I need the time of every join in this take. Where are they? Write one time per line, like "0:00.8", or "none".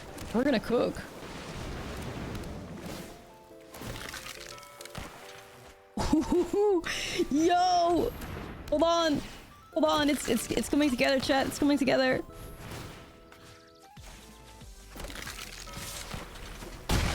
0:01.2
0:05.6